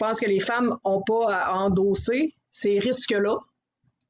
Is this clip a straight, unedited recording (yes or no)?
yes